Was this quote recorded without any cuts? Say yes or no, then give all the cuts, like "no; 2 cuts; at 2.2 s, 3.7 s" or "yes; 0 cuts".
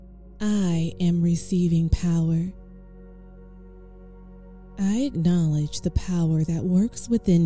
no; 2 cuts; at 2.5 s, 4.7 s